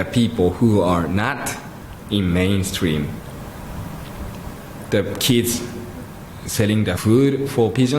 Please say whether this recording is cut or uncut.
cut